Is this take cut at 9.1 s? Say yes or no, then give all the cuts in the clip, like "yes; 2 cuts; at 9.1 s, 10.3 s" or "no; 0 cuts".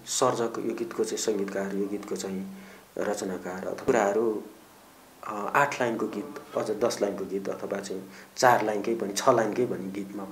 no; 1 cut; at 3.8 s